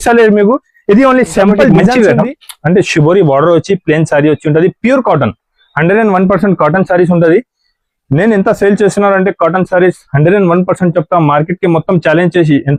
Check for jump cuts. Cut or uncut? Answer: cut